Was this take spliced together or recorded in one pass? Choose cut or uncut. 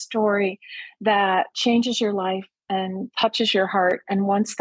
cut